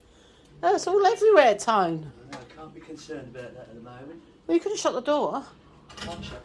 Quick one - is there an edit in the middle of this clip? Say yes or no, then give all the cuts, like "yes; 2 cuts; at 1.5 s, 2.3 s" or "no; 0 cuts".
no; 0 cuts